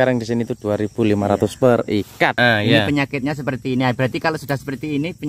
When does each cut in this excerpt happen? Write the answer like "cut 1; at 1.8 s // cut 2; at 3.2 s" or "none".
cut 1; at 2.4 s